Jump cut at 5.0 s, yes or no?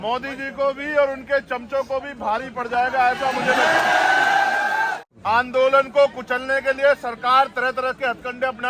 yes